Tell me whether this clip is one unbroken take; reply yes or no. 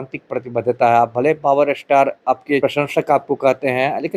no